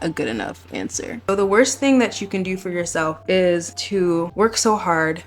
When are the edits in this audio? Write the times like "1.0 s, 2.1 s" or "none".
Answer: 1.3 s, 3.2 s, 4.0 s